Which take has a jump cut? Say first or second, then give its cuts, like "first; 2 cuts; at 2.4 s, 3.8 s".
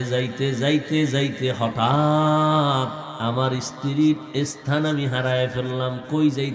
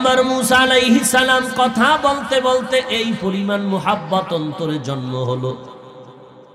first; 1 cut; at 3.1 s